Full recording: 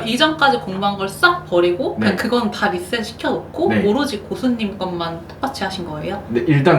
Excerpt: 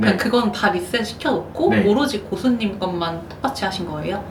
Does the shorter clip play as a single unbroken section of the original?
yes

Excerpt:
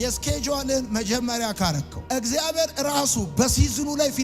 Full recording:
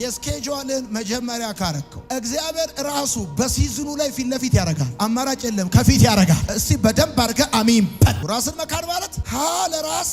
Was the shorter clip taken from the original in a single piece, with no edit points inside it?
yes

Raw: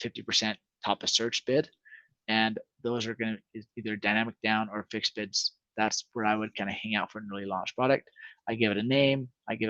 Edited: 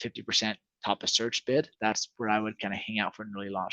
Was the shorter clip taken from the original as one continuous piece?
no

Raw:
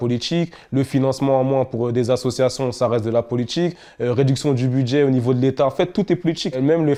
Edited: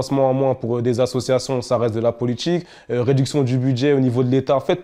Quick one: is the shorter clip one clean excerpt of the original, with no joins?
yes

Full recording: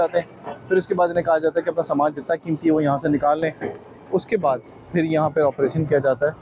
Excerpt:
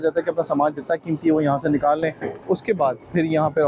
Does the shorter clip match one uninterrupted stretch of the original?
no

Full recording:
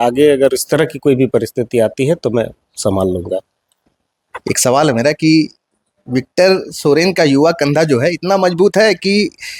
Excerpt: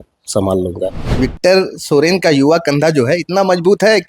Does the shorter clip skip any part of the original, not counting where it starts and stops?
yes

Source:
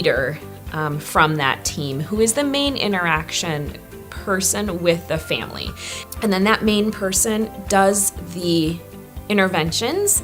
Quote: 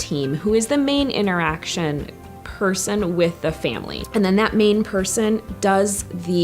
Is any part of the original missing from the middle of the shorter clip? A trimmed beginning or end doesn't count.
yes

